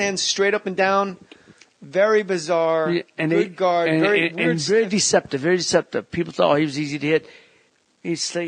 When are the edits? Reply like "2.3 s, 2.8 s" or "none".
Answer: 6.0 s